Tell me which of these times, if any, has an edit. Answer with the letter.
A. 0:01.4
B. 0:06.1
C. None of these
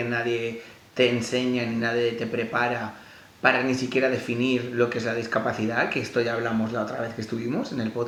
C